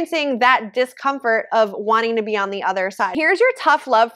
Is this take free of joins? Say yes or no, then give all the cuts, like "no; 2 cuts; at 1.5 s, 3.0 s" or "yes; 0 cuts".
no; 1 cut; at 3.1 s